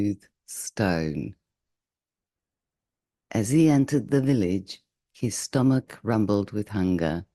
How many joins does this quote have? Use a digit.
1